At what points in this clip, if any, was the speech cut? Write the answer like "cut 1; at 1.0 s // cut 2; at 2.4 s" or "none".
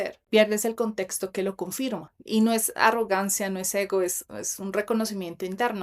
cut 1; at 2.1 s

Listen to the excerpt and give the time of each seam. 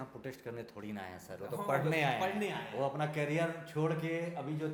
none

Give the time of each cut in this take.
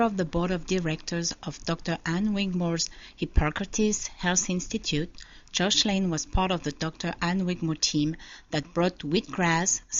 none

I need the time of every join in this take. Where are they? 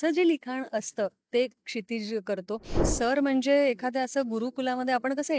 cut 1; at 2.8 s

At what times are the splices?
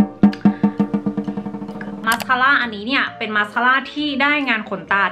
cut 1; at 2.0 s

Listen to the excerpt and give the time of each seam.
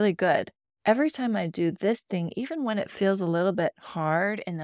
none

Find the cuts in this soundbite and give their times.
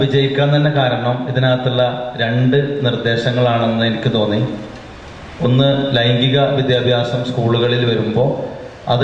none

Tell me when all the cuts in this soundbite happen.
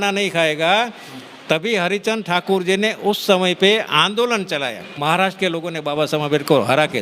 cut 1; at 5.0 s

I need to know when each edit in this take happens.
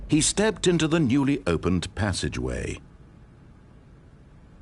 cut 1; at 2.8 s

